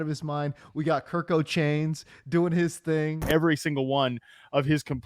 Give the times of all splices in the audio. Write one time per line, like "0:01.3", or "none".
0:03.2